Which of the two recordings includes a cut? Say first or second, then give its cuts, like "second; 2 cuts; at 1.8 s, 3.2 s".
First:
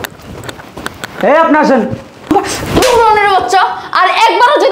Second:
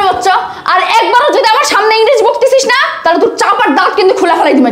first; 1 cut; at 2.3 s